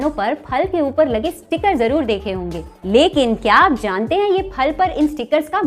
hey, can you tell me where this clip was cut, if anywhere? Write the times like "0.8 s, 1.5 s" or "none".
none